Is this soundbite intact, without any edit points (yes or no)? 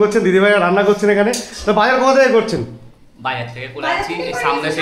yes